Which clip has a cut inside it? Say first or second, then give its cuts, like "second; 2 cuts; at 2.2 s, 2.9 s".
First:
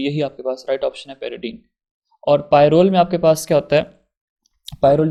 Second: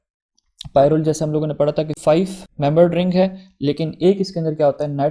second; 1 cut; at 1.9 s